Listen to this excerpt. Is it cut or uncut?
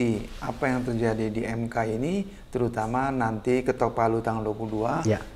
uncut